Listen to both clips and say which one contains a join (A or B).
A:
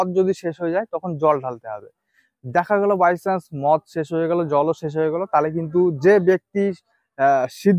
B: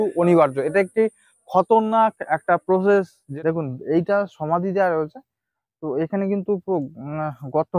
B